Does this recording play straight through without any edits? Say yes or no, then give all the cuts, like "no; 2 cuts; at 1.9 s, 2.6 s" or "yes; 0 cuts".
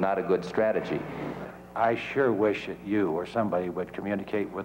no; 1 cut; at 1.4 s